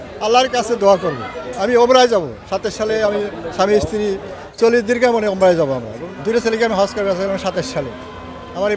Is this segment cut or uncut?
cut